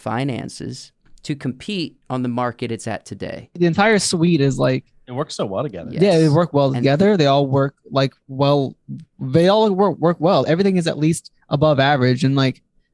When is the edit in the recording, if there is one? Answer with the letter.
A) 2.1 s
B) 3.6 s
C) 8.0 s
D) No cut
B